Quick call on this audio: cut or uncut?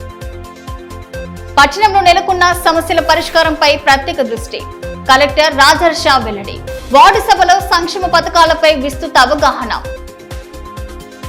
cut